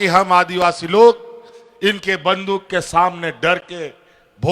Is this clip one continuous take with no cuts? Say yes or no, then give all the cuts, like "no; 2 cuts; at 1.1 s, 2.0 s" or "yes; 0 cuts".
yes; 0 cuts